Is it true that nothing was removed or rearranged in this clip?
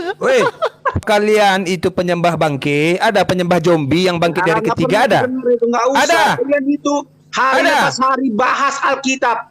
no; 1 cut; at 1.0 s

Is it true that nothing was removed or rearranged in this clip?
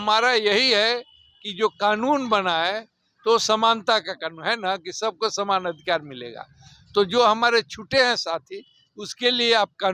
yes; 0 cuts

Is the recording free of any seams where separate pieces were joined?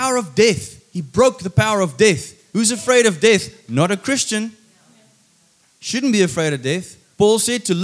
yes; 0 cuts

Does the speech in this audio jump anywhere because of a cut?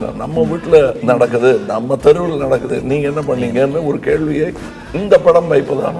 yes; 2 cuts; at 1.0 s, 2.7 s

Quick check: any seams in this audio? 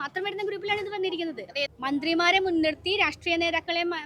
yes; 1 cut; at 1.7 s

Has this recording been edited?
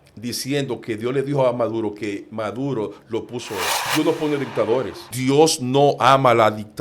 yes; 2 cuts; at 3.8 s, 5.0 s

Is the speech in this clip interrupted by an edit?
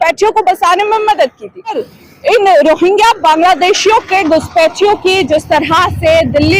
yes; 1 cut; at 1.9 s

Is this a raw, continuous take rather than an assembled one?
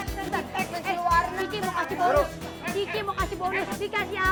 yes; 0 cuts

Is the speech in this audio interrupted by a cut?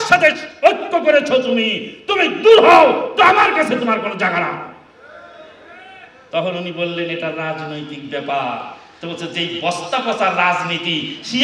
no; 0 cuts

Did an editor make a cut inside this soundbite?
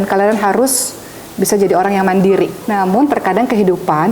yes; 1 cut; at 2.6 s

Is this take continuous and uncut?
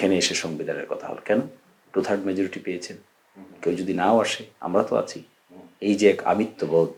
yes; 0 cuts

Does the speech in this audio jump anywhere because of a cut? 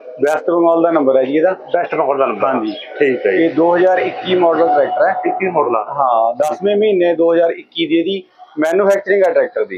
no; 0 cuts

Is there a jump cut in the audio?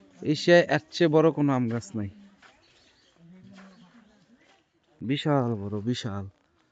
yes; 1 cut; at 5.2 s

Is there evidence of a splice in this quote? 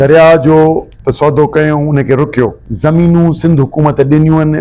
yes; 2 cuts; at 0.9 s, 2.7 s

